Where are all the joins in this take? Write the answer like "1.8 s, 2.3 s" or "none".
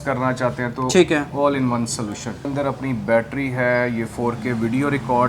2.5 s